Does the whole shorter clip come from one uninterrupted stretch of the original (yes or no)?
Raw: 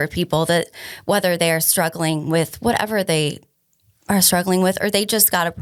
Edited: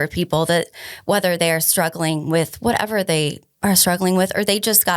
no